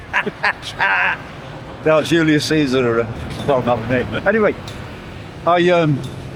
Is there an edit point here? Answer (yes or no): no